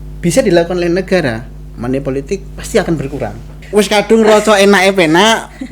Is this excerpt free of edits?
no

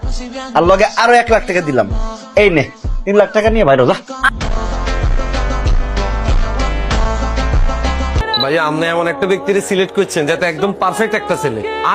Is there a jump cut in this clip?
yes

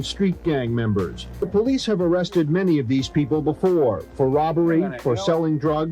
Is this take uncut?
no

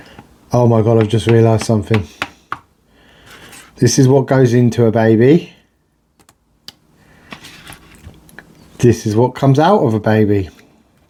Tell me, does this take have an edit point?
no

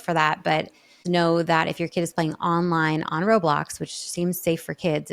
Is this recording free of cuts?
no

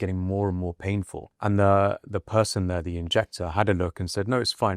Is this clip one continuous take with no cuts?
no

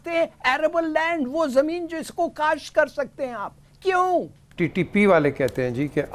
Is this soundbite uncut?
no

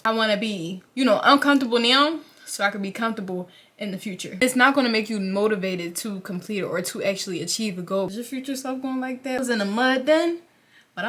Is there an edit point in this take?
yes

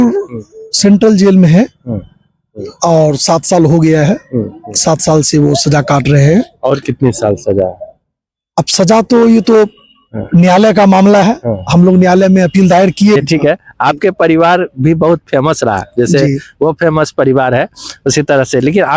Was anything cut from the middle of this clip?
yes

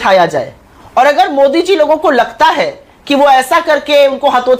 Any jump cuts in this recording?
no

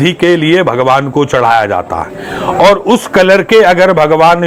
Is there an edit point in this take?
no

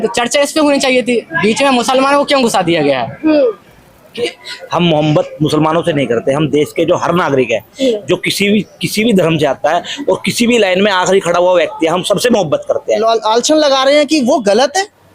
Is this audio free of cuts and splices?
no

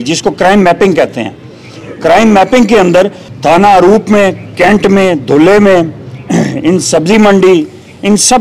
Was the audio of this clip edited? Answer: yes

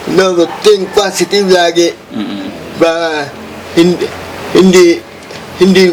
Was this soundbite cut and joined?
no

